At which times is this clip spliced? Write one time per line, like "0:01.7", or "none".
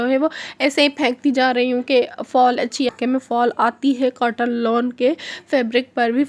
0:02.9